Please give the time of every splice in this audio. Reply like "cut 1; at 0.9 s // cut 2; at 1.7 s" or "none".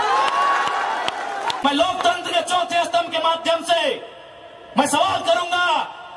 cut 1; at 1.6 s

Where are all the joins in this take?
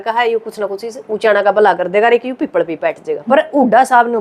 cut 1; at 3.1 s

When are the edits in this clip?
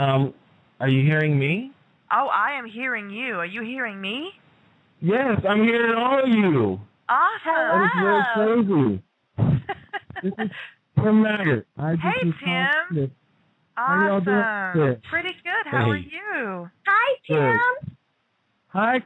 cut 1; at 6.5 s

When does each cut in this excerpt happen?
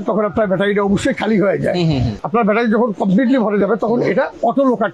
cut 1; at 2.2 s

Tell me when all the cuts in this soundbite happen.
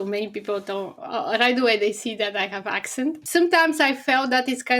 cut 1; at 3.2 s

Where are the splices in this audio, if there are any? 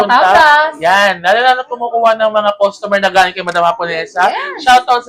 none

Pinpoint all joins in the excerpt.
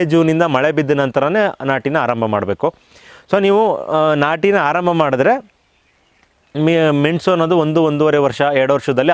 none

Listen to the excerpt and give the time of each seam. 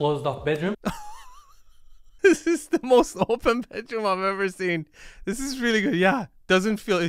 none

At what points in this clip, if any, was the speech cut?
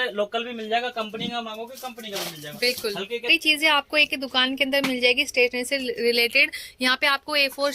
cut 1; at 3.3 s

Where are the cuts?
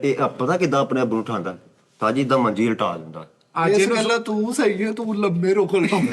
cut 1; at 3.5 s

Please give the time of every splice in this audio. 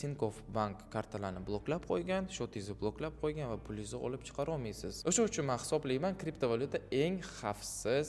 cut 1; at 4.9 s

